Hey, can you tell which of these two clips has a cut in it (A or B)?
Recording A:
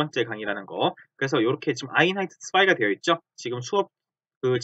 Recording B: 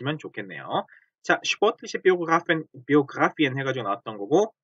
A